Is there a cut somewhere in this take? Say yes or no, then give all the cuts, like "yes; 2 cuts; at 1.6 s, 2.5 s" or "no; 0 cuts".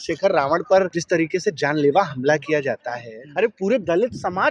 yes; 2 cuts; at 1.0 s, 3.2 s